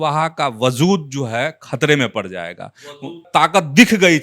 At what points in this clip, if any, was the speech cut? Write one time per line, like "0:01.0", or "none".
0:03.2